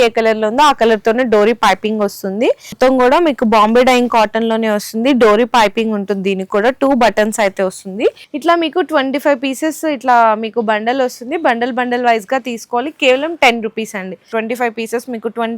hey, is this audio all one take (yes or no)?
no